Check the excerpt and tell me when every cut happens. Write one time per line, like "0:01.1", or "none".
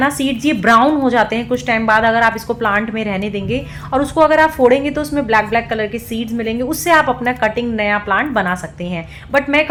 none

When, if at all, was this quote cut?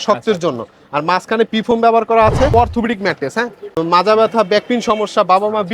0:02.5
0:03.6

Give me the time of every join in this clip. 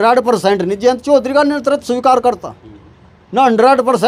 none

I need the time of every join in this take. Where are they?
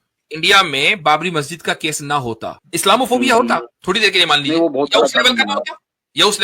0:02.5
0:03.7

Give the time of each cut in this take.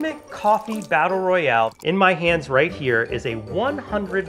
0:01.8

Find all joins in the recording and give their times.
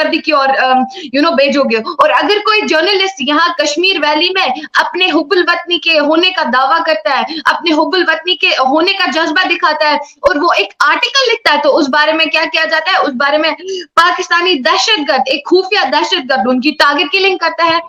none

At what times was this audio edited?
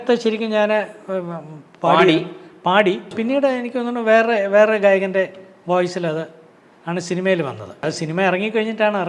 0:03.1
0:08.0

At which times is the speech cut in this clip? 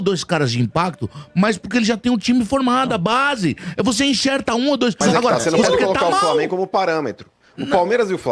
0:05.0

